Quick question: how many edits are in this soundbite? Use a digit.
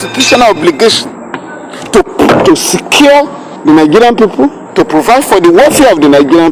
2